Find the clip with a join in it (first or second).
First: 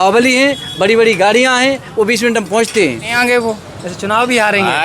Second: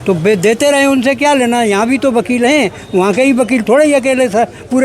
first